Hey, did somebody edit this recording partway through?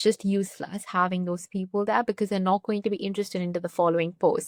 no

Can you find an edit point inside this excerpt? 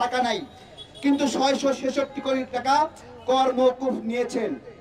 yes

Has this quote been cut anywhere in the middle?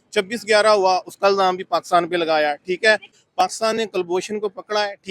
yes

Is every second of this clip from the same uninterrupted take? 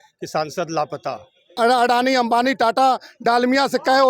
no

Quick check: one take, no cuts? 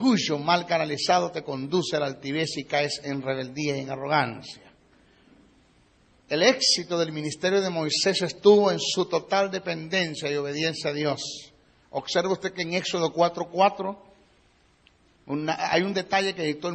yes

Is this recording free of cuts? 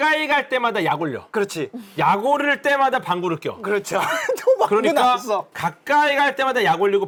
yes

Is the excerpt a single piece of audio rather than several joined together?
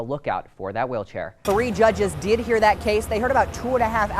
no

